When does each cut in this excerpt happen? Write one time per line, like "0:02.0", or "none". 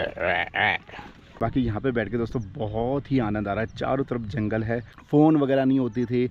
0:01.4
0:04.9